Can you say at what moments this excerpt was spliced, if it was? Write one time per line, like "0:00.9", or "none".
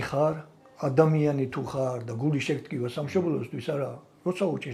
none